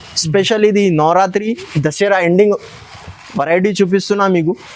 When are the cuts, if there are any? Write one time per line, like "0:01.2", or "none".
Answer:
none

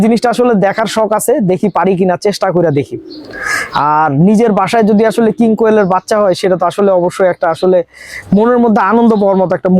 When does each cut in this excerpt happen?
none

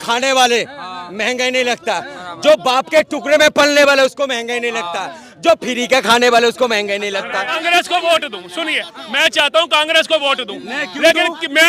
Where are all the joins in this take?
0:07.6

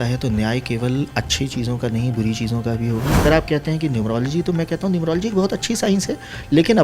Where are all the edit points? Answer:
0:03.2

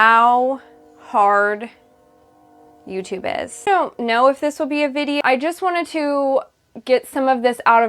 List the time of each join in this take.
0:03.7
0:05.2

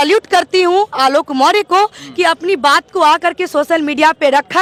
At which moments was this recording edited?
none

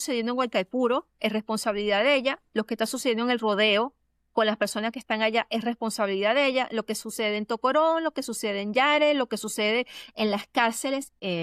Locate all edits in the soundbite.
none

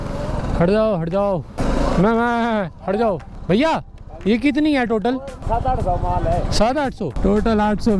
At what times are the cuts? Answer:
0:01.6
0:03.4
0:05.3
0:07.1

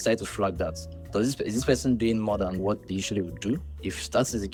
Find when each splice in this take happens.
none

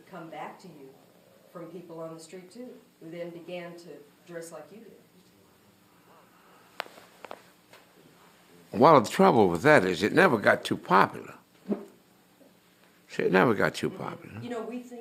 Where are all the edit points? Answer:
none

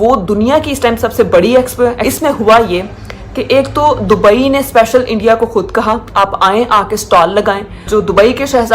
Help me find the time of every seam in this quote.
0:02.0
0:07.9

